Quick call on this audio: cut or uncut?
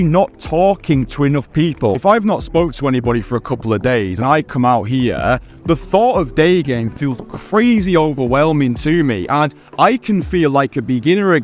cut